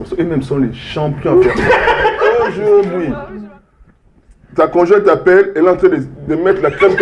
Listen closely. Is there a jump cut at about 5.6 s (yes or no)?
no